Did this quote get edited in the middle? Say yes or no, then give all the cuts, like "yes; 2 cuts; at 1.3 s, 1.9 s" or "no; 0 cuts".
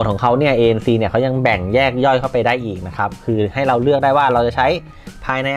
no; 0 cuts